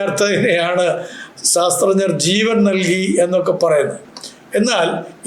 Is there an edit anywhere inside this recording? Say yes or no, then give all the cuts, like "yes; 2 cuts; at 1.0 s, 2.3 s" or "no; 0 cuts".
yes; 1 cut; at 4.0 s